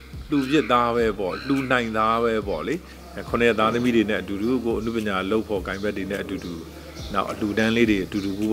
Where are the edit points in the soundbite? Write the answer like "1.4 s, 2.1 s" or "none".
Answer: 2.9 s